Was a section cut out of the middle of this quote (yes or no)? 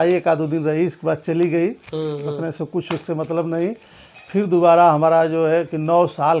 no